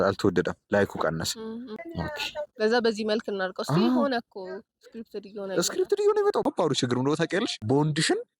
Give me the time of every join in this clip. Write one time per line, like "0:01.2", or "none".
0:01.8
0:06.4
0:07.6